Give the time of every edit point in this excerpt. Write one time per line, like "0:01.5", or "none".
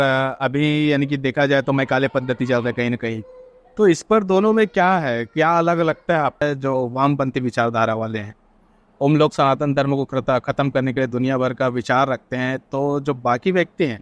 0:06.4